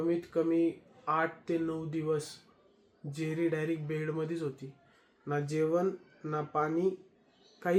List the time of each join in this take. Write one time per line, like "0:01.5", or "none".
none